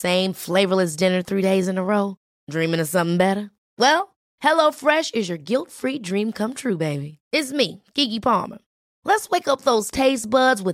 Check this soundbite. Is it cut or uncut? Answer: uncut